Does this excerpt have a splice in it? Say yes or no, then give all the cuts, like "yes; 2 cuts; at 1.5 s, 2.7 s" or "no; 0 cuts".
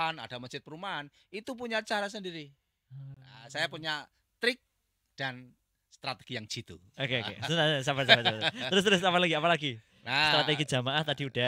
no; 0 cuts